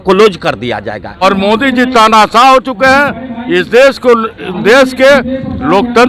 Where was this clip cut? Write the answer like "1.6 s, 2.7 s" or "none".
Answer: 1.2 s

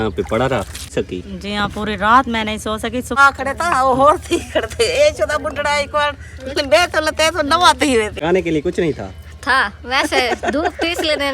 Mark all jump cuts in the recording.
0.9 s, 3.2 s, 8.2 s

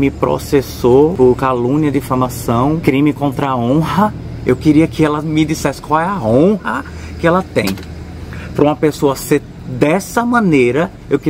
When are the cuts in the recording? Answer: 1.1 s, 2.8 s

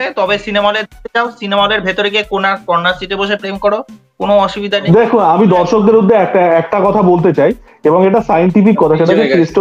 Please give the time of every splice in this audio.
4.8 s

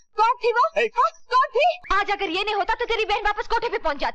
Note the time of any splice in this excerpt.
1.8 s

